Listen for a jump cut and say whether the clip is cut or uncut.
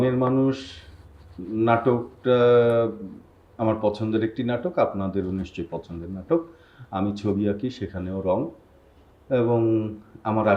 uncut